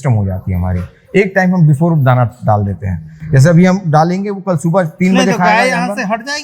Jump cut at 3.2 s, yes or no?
no